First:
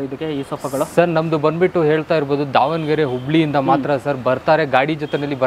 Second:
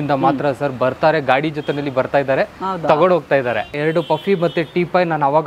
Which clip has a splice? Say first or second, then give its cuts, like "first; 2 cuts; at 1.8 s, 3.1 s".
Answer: second; 1 cut; at 3.7 s